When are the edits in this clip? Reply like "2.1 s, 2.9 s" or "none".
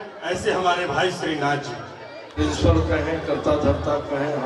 2.2 s